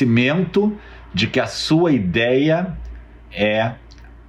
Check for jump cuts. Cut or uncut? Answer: uncut